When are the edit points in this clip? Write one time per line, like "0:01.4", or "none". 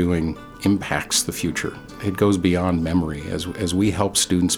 0:01.9